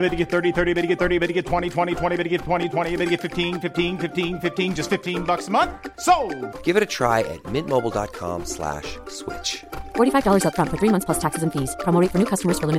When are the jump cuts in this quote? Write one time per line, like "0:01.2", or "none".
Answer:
none